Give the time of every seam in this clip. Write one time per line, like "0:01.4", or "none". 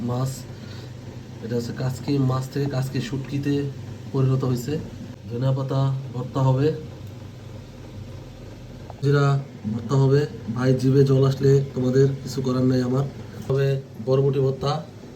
0:05.1
0:09.0
0:13.4

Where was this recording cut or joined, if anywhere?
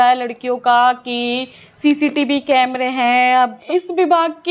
0:03.6

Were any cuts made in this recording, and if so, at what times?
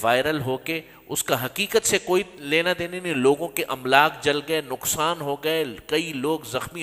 none

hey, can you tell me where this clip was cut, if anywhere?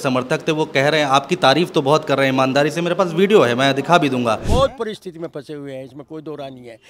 0:04.4

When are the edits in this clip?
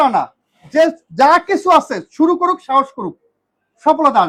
none

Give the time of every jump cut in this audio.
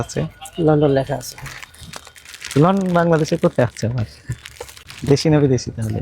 0:04.9

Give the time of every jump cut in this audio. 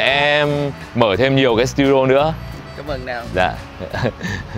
none

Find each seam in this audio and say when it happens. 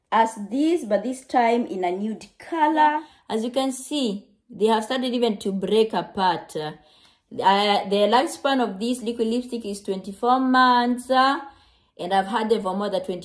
0:02.9

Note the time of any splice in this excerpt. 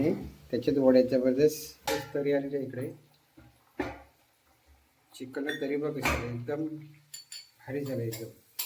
0:01.9

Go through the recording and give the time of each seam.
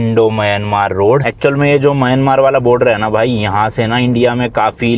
0:01.3

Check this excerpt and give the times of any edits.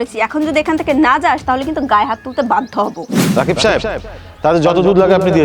0:03.1

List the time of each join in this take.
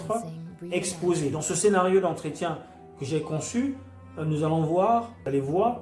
0:01.4

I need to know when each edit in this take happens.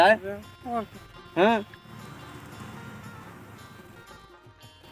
0:01.8

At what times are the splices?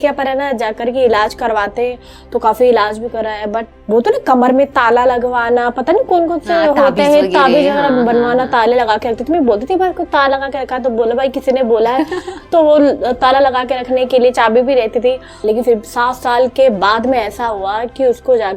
0:15.3

